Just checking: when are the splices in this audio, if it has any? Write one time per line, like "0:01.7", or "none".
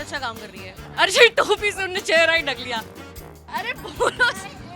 0:02.9